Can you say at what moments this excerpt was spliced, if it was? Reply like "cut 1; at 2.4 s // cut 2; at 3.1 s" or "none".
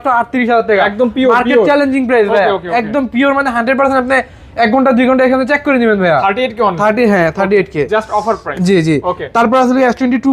none